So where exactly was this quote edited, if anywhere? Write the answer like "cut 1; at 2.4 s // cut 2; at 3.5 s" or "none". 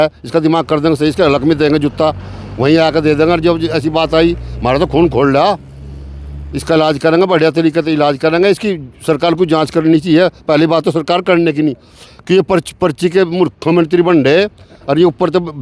none